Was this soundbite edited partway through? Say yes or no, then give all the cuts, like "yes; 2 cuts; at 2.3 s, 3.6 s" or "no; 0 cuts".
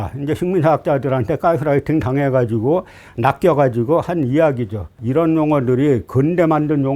yes; 1 cut; at 5.0 s